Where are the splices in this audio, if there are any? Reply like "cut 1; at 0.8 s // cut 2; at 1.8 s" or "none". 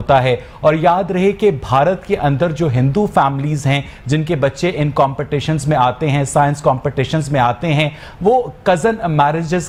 none